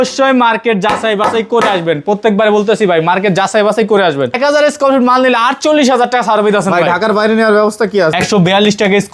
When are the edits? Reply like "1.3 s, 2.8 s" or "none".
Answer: 4.3 s, 8.1 s